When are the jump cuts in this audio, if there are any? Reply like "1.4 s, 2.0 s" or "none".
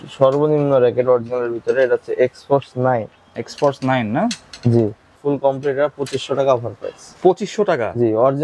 5.2 s